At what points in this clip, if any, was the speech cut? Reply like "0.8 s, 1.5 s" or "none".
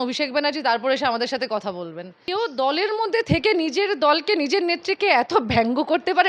2.2 s